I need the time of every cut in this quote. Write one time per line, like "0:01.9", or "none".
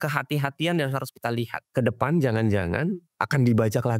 0:01.6
0:03.1